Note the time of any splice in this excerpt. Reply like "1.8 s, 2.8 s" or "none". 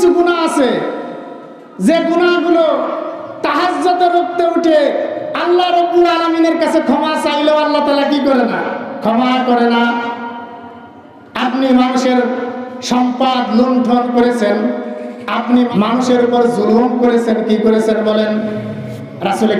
15.7 s